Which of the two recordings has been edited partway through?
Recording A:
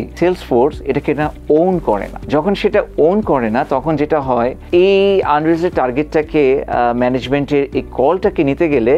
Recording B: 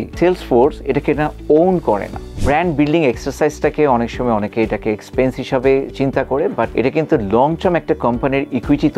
B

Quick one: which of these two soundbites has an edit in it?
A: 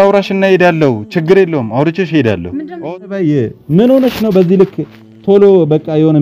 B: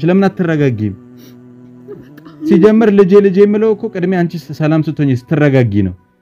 A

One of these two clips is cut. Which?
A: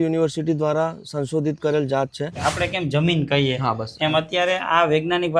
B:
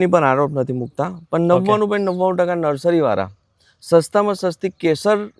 A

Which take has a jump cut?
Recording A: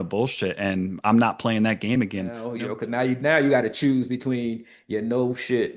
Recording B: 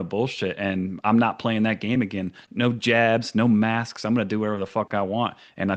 A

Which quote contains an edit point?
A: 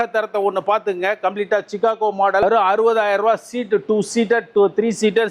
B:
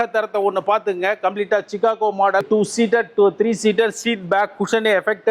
B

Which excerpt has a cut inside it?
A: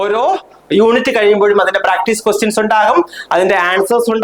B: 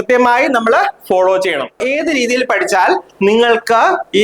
B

